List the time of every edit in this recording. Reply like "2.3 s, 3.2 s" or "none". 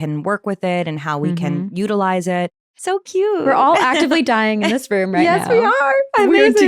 2.7 s